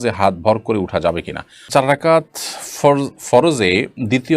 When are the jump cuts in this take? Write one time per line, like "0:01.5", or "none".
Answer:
0:01.6